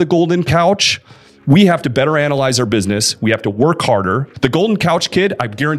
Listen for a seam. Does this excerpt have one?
yes; 1 cut; at 4.3 s

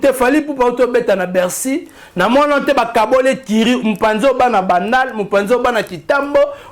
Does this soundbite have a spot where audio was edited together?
no; 0 cuts

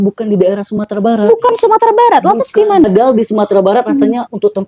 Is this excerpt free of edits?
no; 1 cut; at 2.8 s

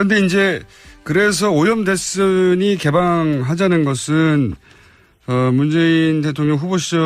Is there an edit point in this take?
yes; 1 cut; at 2.8 s

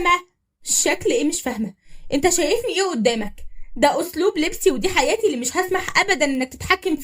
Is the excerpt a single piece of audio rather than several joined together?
yes; 0 cuts

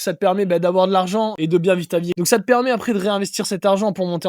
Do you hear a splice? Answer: yes; 2 cuts; at 1.3 s, 2.1 s

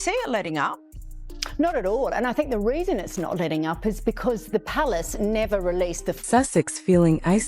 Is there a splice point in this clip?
yes; 1 cut; at 6.1 s

